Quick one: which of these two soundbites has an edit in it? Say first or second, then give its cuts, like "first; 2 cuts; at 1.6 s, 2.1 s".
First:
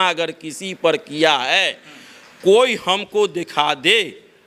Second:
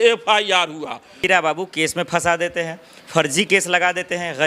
second; 1 cut; at 1.2 s